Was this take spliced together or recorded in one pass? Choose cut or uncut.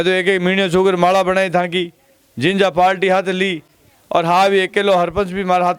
uncut